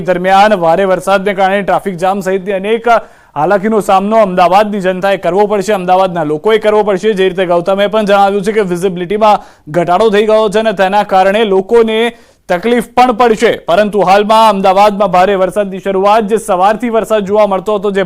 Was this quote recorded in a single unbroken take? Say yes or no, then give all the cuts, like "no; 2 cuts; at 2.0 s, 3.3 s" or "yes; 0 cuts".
no; 1 cut; at 5.6 s